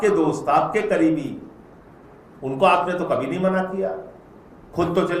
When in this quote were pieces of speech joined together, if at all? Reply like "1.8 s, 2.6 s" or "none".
none